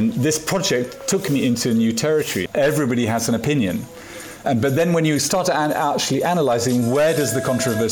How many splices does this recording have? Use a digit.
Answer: 2